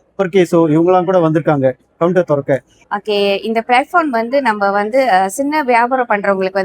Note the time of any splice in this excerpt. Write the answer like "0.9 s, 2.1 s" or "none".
2.8 s